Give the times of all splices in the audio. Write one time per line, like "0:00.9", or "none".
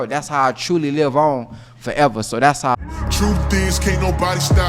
0:02.7